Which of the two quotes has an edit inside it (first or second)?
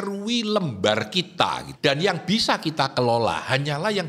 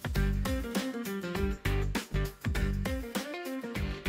first